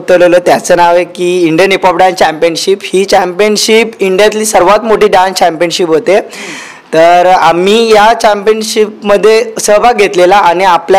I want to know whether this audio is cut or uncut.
uncut